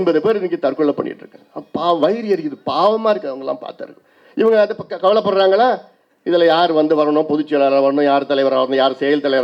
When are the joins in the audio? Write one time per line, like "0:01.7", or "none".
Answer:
none

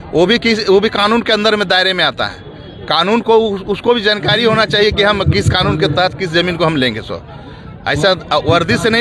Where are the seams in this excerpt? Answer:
none

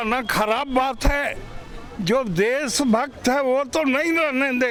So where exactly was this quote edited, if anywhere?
none

